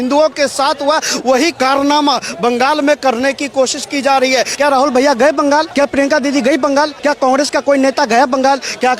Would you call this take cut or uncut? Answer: cut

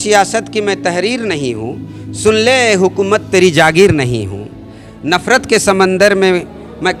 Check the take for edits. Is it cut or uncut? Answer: uncut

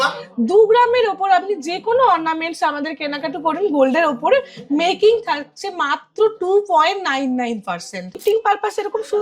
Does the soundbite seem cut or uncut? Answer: cut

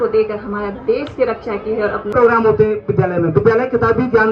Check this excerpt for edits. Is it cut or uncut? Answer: cut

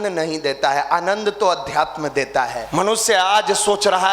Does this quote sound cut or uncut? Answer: cut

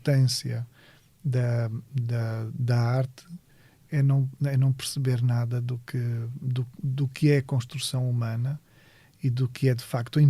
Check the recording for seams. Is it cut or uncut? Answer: uncut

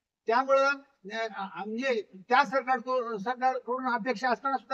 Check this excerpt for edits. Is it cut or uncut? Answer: uncut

